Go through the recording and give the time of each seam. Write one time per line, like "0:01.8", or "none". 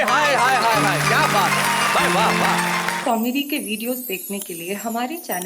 0:02.9